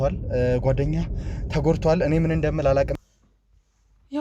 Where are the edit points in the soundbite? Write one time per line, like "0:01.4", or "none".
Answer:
0:03.0